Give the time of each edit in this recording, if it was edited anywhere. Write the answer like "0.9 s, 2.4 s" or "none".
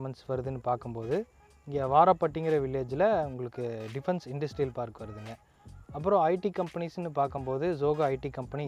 none